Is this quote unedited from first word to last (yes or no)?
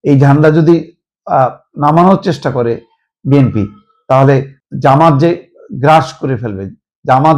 no